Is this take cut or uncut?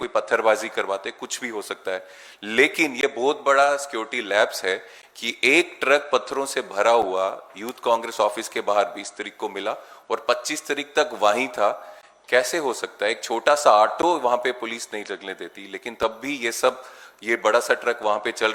uncut